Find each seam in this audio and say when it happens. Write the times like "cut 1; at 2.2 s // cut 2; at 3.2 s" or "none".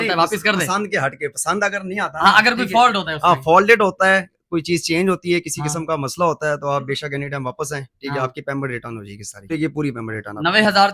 cut 1; at 9.5 s